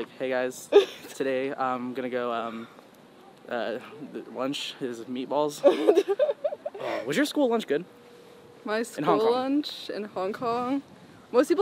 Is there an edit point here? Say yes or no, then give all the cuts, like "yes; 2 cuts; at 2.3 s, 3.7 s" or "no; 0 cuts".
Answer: no; 0 cuts